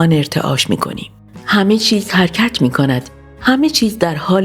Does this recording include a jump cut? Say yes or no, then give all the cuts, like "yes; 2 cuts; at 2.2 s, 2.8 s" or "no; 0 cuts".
no; 0 cuts